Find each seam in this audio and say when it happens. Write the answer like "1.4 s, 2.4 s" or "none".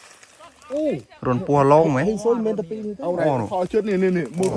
none